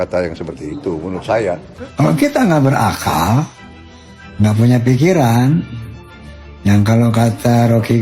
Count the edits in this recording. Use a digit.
1